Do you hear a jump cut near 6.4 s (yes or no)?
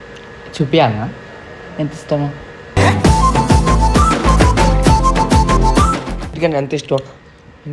yes